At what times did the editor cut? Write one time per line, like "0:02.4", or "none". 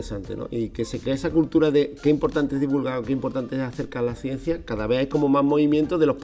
none